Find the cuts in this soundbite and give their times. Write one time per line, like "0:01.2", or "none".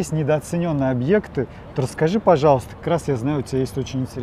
none